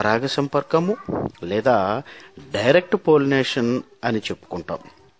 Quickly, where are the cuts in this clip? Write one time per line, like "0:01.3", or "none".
0:01.6